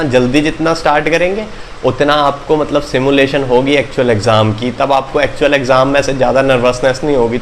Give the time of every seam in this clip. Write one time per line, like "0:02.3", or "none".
none